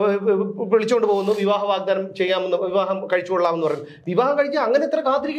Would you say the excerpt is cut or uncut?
uncut